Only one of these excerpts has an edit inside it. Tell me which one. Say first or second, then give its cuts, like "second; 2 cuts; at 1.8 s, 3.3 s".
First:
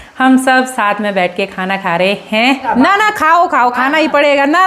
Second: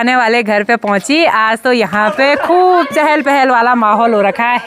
first; 1 cut; at 2.6 s